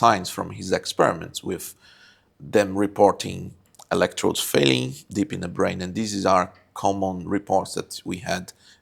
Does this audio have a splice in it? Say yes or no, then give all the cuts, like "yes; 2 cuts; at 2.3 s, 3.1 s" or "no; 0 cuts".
no; 0 cuts